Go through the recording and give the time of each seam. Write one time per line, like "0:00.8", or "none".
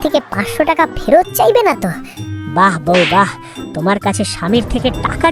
none